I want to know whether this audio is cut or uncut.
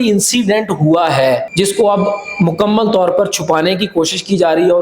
cut